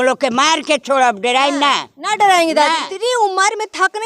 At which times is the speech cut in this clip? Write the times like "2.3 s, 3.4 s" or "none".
2.9 s